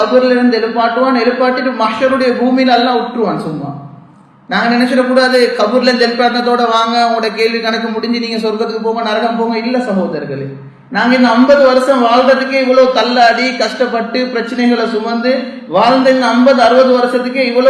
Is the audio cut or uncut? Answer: uncut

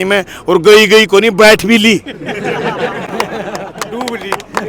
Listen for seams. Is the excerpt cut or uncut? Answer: uncut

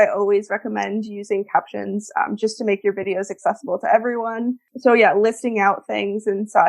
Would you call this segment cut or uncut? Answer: cut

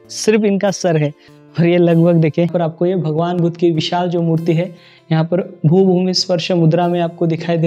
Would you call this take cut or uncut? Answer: cut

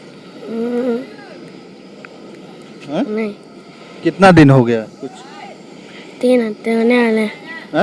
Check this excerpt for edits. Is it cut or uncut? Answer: uncut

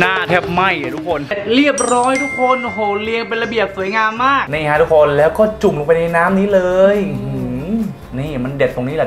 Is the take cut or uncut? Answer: cut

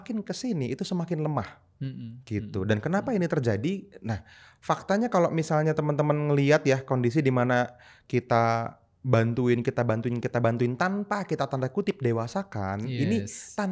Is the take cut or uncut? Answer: uncut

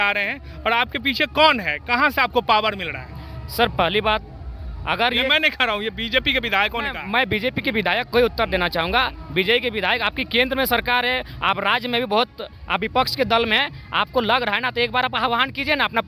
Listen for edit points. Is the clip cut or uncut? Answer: uncut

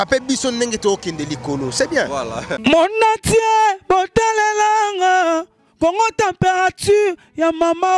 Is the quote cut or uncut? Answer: cut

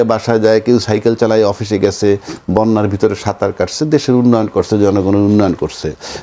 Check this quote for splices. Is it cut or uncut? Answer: uncut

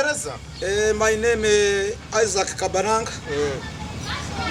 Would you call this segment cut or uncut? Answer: uncut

